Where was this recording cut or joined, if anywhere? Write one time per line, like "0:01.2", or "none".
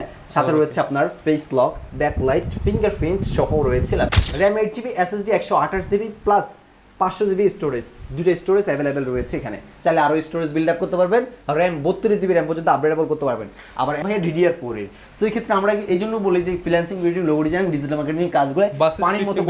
0:04.2
0:14.0